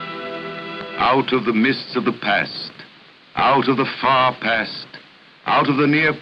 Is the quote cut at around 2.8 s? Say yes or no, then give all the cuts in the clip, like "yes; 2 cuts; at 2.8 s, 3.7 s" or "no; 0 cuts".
no; 1 cut; at 4.1 s